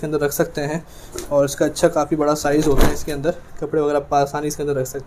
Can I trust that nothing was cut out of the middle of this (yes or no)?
yes